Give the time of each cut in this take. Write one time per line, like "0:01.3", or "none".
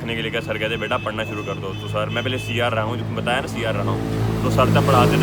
none